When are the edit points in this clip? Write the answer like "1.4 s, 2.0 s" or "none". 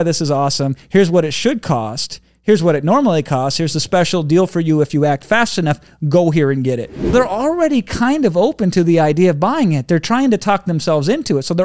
7.1 s